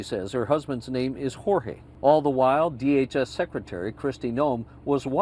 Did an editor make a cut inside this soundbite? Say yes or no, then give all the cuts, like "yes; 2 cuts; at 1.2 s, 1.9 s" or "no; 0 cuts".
yes; 1 cut; at 1.8 s